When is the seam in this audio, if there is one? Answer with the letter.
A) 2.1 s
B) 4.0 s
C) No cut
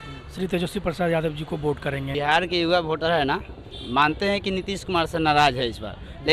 A